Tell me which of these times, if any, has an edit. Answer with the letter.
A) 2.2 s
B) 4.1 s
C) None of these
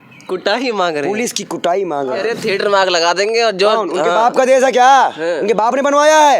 A